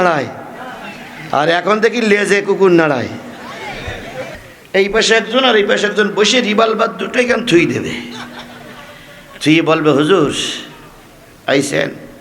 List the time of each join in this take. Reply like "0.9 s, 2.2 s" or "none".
4.3 s